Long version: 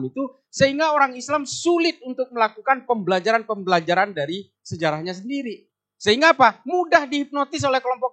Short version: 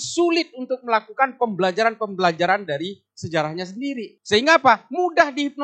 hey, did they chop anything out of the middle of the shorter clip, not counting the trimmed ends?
yes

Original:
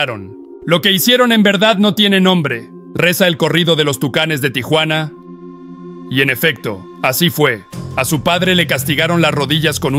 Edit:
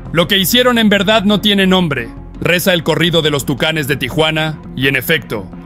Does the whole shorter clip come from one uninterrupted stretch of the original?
no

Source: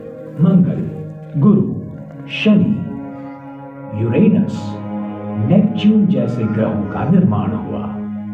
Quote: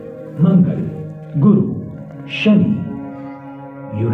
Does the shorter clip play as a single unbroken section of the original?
yes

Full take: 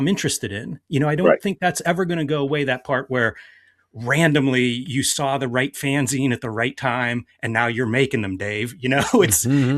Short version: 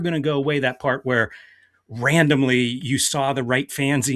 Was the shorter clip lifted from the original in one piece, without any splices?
yes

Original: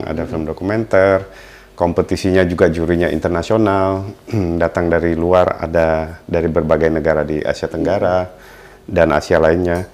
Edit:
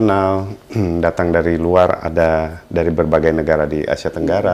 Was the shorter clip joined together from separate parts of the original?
no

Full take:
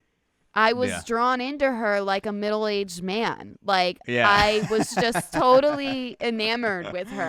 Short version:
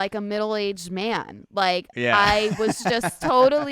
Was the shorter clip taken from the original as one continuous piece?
yes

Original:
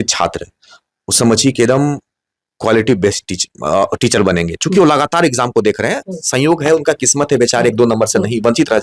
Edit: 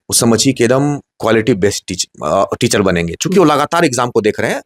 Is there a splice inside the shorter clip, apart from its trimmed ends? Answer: yes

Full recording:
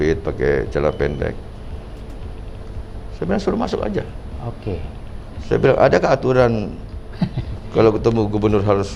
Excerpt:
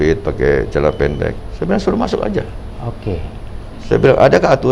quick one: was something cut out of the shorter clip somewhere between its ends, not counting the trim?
yes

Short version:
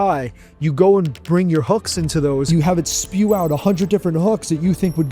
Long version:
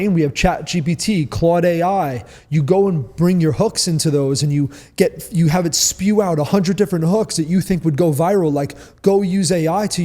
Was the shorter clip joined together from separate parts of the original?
yes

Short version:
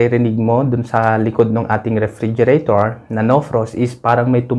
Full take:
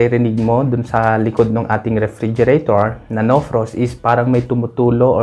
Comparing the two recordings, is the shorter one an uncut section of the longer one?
yes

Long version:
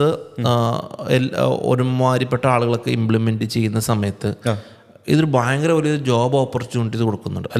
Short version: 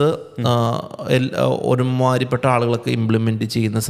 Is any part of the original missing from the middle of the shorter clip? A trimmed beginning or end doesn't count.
no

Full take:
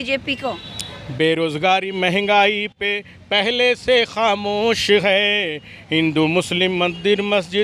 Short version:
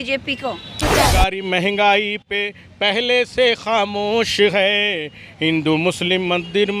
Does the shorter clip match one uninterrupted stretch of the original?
no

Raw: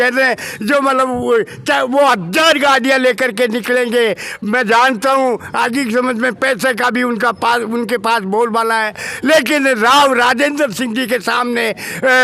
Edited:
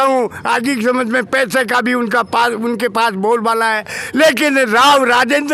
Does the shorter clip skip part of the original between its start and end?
no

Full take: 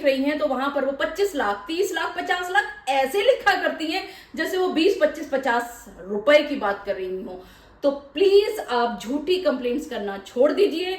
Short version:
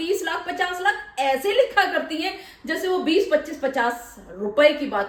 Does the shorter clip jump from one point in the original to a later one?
no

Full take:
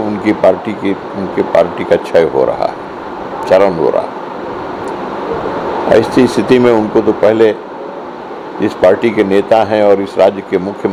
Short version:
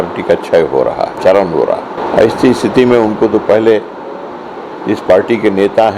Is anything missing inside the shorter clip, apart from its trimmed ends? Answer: yes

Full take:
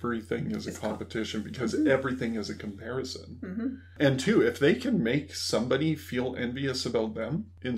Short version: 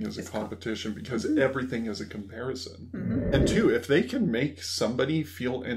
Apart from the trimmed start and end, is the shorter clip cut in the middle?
yes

